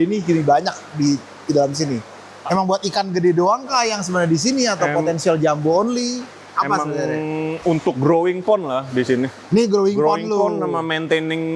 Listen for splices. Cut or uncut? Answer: uncut